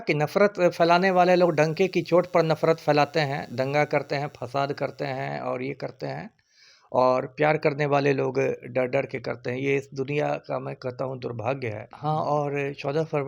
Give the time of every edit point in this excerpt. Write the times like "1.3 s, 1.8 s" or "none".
11.9 s